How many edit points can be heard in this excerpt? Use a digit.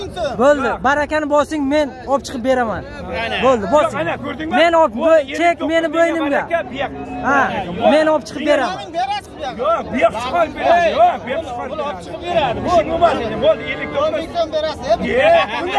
0